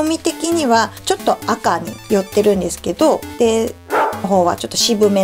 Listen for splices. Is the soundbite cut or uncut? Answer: cut